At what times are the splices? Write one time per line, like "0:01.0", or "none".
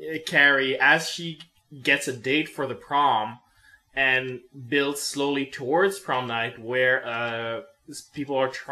none